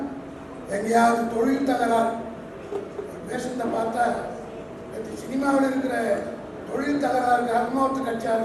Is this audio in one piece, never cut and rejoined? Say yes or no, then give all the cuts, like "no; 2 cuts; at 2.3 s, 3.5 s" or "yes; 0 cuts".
yes; 0 cuts